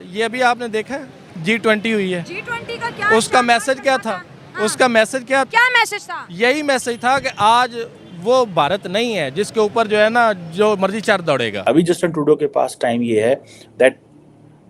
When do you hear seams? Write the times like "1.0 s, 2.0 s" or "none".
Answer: 11.5 s